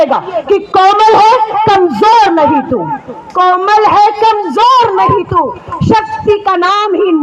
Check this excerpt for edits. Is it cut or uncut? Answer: uncut